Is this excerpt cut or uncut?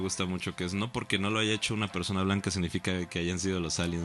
uncut